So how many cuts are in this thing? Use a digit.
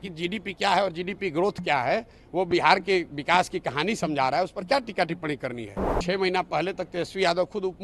1